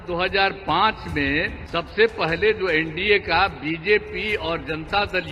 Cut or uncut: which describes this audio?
cut